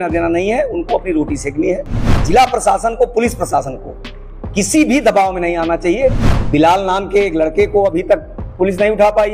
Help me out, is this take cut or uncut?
cut